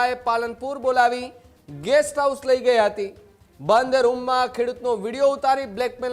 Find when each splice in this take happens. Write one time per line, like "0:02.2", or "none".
none